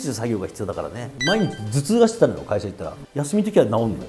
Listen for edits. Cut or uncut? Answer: cut